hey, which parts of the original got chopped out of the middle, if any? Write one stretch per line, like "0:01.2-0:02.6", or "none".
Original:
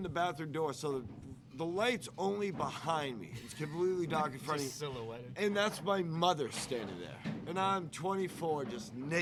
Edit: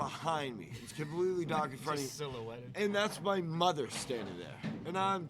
none